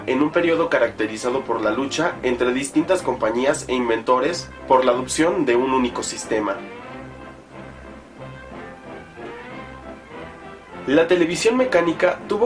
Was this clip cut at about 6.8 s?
yes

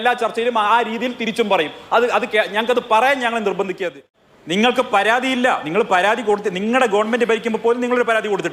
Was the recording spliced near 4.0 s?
yes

